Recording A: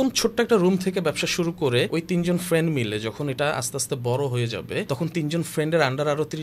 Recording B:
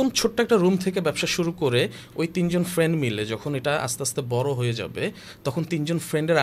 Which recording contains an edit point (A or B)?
A